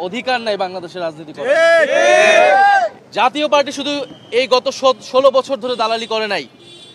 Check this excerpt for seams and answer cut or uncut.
cut